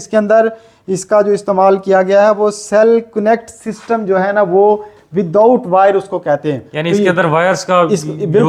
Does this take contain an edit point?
no; 0 cuts

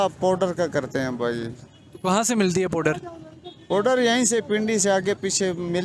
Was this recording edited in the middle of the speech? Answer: no; 0 cuts

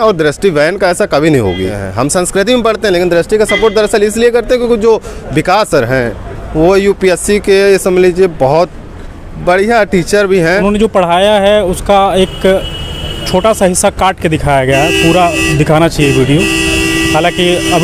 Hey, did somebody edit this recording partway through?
yes; 2 cuts; at 1.8 s, 10.6 s

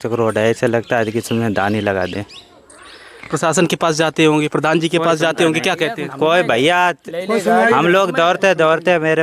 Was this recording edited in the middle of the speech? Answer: no; 0 cuts

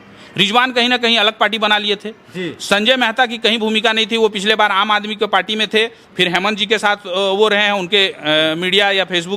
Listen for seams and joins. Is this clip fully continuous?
yes; 0 cuts

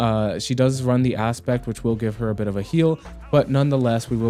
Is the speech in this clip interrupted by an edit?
no; 0 cuts

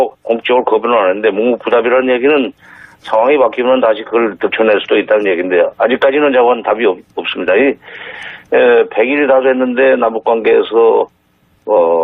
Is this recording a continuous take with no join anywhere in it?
no; 1 cut; at 5.7 s

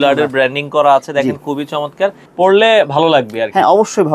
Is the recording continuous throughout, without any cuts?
no; 1 cut; at 2.2 s

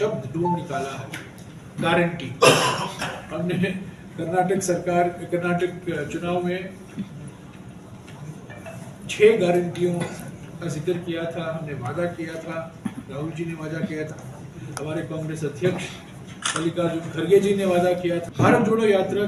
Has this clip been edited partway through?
yes; 1 cut; at 18.3 s

